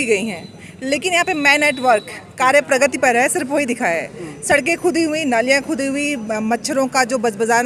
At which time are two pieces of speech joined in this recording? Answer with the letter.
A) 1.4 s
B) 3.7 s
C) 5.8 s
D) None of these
D